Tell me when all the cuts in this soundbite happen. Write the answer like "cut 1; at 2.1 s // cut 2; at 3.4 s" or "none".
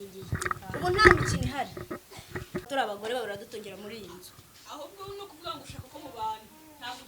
cut 1; at 2.7 s